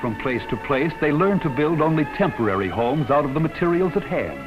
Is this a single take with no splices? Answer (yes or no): no